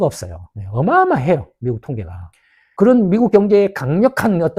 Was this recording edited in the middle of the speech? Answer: no; 0 cuts

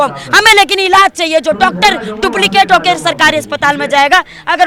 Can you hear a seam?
no; 0 cuts

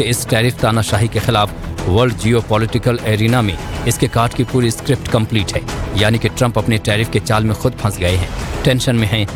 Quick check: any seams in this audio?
no; 0 cuts

